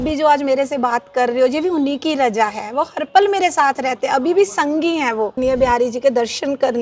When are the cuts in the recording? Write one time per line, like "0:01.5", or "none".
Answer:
0:05.3